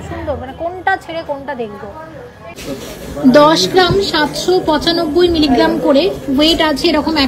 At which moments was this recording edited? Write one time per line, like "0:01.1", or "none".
0:02.6

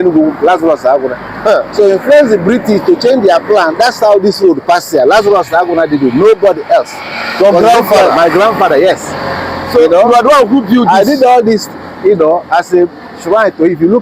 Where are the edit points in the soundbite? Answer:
none

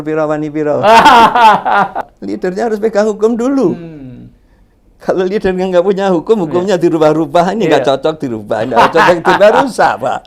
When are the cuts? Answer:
0:02.0

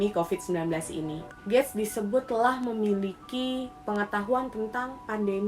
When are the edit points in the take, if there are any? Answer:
0:01.2

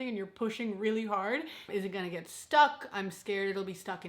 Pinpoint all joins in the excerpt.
0:01.6

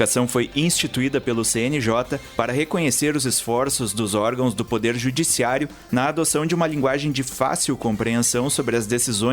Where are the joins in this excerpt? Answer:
0:02.2

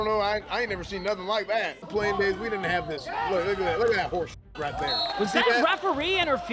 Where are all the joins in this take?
0:01.9
0:05.1

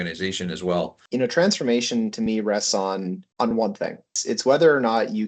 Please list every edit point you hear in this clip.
0:01.0
0:04.1

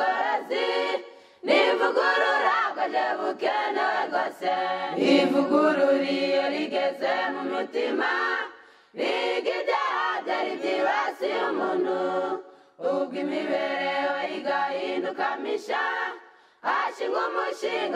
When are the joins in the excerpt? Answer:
0:04.7

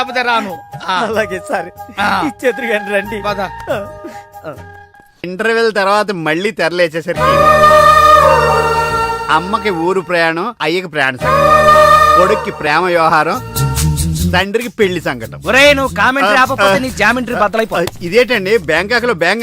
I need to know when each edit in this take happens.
0:05.2

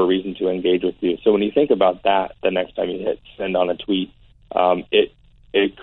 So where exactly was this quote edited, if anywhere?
none

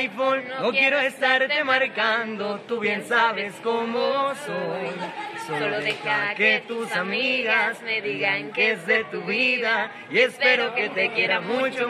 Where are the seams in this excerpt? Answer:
none

